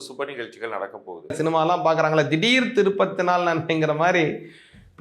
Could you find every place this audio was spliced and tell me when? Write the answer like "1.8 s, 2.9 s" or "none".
1.3 s